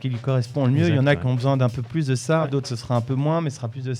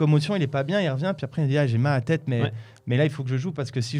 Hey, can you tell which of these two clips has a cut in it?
first; 1 cut; at 2.5 s

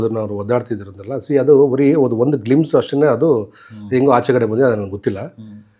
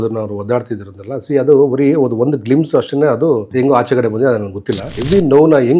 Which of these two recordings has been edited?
second; 2 cuts; at 3.5 s, 5.0 s

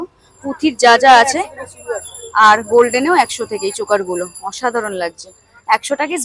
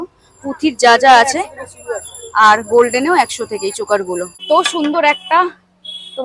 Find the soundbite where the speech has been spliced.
second; 1 cut; at 4.4 s

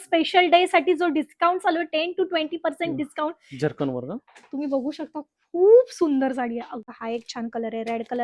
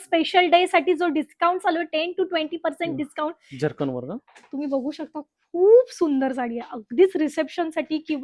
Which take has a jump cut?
first; 1 cut; at 6.8 s

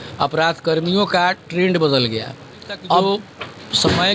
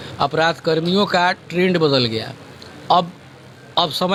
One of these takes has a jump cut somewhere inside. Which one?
first; 1 cut; at 3.0 s

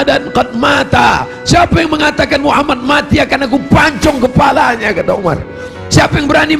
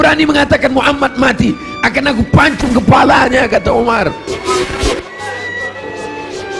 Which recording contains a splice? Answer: second; 1 cut; at 4.3 s

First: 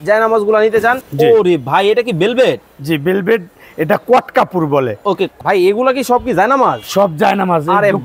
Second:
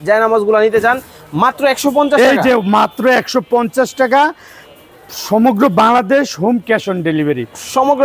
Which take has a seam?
first; 2 cuts; at 1.0 s, 5.3 s

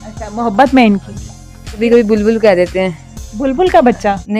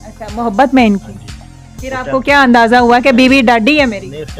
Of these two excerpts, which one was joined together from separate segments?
first; 1 cut; at 1.8 s

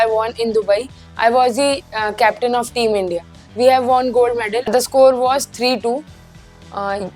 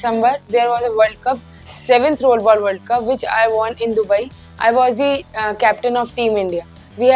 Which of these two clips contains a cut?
first; 1 cut; at 4.7 s

